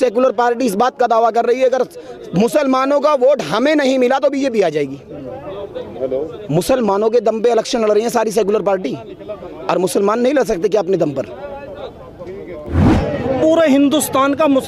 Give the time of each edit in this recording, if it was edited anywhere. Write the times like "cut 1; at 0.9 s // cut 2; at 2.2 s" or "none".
cut 1; at 12.8 s